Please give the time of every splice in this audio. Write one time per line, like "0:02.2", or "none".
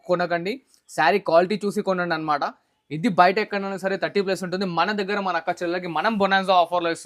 none